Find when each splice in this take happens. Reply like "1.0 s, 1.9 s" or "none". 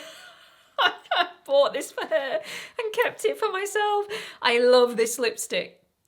none